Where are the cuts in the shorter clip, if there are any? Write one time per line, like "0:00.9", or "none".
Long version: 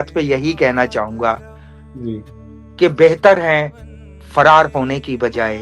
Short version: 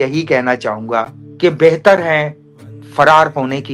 0:01.2